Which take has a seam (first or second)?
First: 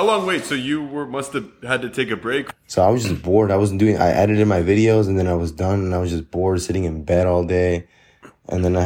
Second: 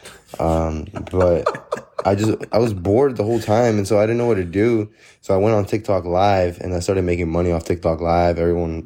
first